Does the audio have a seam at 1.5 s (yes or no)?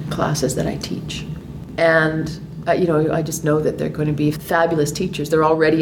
yes